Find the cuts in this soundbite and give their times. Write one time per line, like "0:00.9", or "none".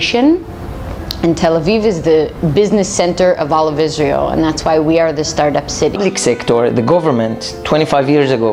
none